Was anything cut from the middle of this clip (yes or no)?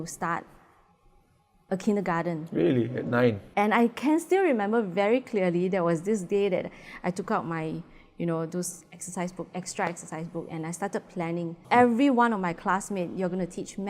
yes